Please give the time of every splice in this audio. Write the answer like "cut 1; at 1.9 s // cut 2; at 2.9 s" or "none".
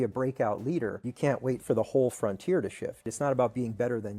cut 1; at 1.0 s // cut 2; at 3.1 s